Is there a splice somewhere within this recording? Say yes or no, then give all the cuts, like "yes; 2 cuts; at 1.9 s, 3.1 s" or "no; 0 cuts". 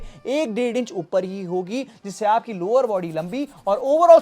no; 0 cuts